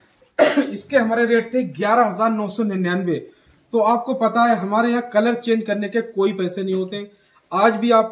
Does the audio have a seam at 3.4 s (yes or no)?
no